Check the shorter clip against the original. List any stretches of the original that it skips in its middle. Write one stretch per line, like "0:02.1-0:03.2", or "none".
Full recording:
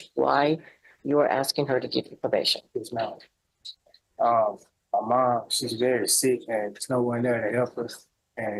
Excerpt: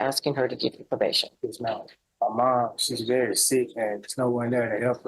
0:03.3-0:04.7